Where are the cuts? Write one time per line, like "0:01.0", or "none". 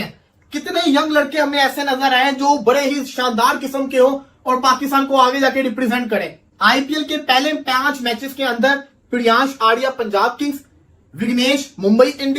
0:06.4